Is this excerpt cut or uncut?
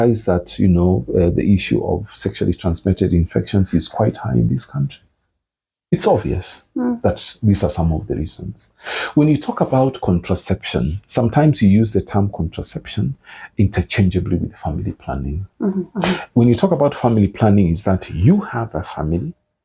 uncut